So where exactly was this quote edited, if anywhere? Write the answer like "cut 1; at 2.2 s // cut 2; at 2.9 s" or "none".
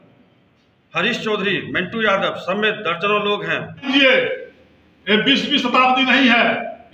cut 1; at 3.9 s